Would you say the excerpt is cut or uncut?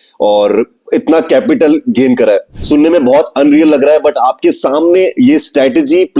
cut